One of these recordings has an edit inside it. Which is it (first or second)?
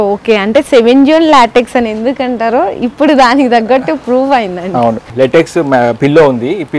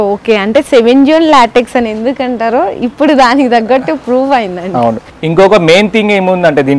first